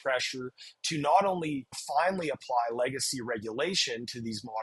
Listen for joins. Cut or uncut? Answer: cut